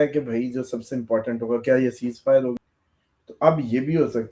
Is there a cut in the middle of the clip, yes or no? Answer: yes